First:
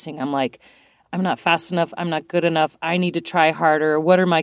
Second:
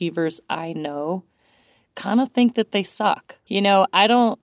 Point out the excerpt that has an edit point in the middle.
second; 1 cut; at 3.3 s

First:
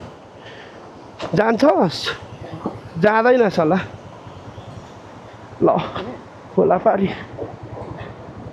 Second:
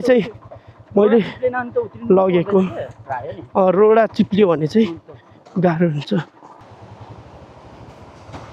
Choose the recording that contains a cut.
second; 1 cut; at 6.6 s

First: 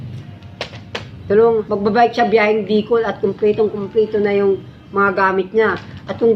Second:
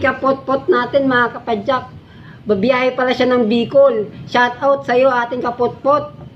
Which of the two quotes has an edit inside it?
first; 1 cut; at 1.7 s

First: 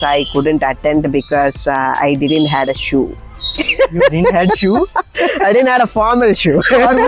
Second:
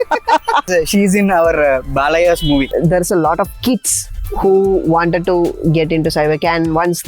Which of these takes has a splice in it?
second; 1 cut; at 2.7 s

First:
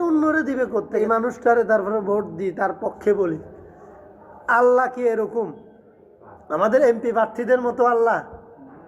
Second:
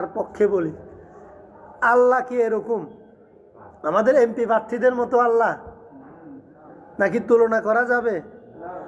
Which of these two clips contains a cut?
first; 1 cut; at 1.0 s

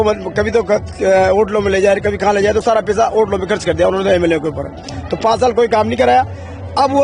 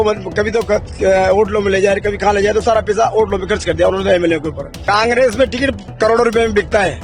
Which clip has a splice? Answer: second; 1 cut; at 4.8 s

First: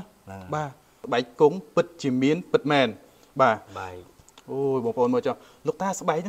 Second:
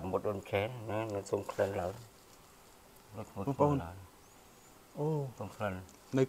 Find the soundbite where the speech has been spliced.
first; 1 cut; at 1.0 s

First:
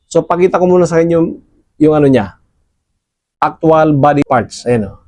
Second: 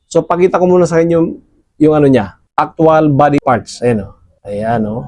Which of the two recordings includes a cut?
second; 1 cut; at 2.4 s

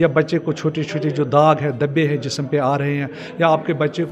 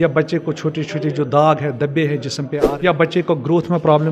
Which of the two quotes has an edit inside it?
second; 1 cut; at 2.6 s

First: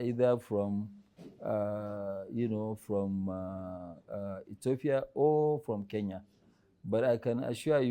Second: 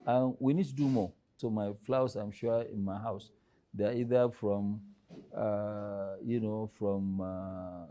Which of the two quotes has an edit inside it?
second; 1 cut; at 1.3 s

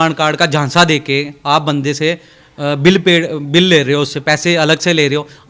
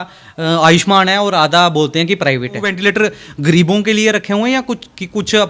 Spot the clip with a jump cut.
second; 1 cut; at 2.7 s

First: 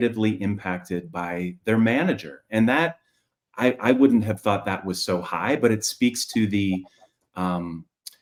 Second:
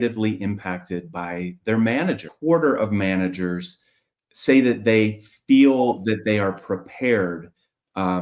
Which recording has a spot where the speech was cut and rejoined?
second; 1 cut; at 2.3 s

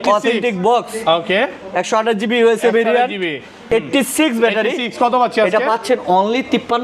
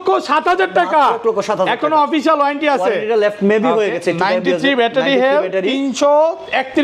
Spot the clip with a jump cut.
first; 1 cut; at 3.6 s

